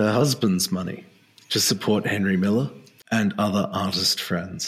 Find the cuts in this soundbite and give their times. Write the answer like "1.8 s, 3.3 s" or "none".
3.0 s